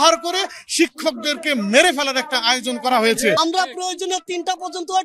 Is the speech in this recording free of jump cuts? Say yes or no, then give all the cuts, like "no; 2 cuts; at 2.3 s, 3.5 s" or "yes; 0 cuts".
no; 1 cut; at 3.4 s